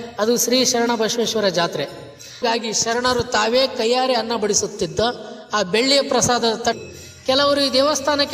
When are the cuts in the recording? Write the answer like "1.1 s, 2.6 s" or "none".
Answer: 2.4 s, 6.8 s